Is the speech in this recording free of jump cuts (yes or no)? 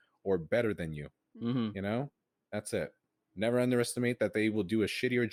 yes